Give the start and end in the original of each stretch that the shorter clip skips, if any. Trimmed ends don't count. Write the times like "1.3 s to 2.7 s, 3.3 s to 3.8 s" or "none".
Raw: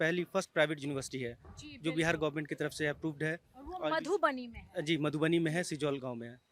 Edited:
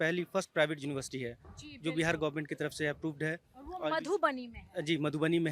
none